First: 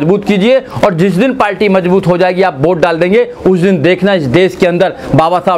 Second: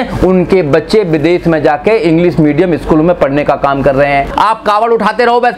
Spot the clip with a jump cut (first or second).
second